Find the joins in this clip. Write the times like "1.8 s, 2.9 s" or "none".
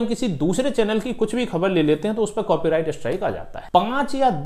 3.5 s